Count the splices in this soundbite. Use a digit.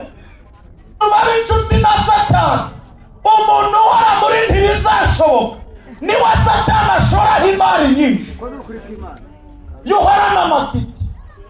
1